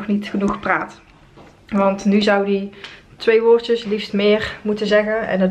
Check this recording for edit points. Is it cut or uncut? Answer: uncut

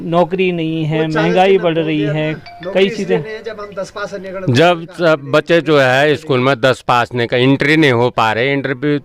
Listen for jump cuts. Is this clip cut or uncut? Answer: uncut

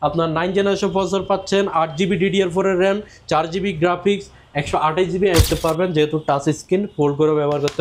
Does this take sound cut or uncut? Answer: cut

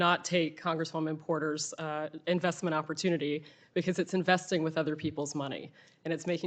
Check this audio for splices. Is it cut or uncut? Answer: uncut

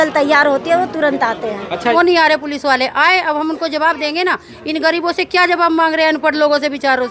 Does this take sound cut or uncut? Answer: cut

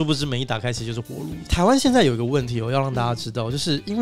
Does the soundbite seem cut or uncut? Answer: uncut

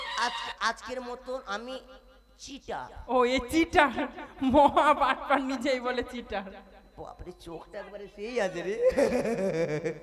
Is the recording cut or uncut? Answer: uncut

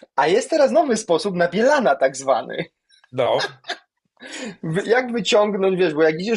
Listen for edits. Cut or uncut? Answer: uncut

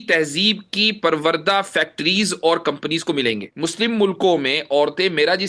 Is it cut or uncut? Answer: cut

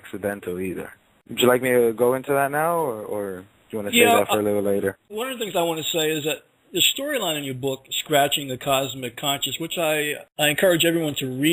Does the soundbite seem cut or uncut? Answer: uncut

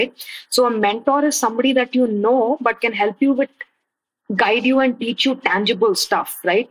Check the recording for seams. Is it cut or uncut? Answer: uncut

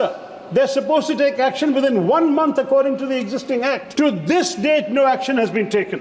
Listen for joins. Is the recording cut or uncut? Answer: cut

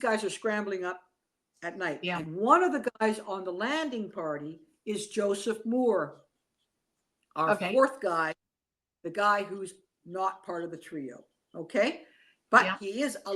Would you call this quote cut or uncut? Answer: uncut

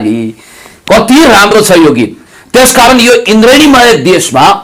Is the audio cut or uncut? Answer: uncut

